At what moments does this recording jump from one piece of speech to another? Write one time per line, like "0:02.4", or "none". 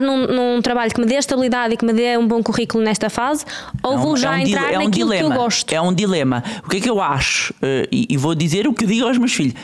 none